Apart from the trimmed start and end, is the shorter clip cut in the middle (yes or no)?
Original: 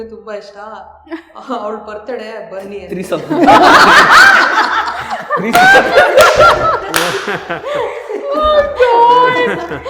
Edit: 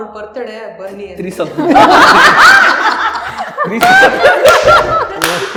no